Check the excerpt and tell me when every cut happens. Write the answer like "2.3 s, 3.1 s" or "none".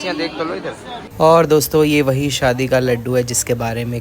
1.0 s